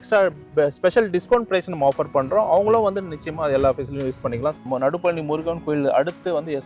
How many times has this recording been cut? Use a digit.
1